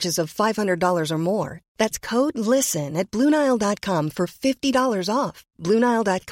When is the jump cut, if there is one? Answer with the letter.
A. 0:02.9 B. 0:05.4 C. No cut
C